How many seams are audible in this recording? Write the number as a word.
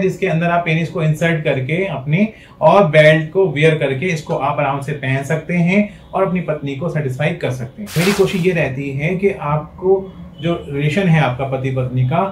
one